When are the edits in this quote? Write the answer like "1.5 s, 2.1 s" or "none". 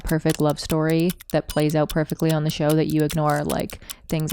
none